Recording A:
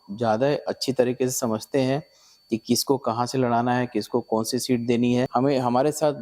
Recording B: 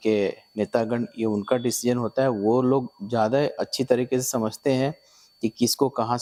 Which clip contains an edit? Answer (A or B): A